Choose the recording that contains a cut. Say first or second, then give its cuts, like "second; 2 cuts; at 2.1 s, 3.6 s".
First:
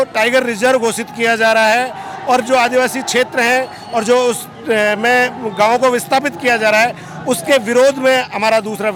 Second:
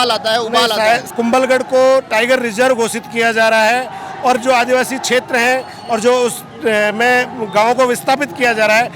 second; 1 cut; at 1.1 s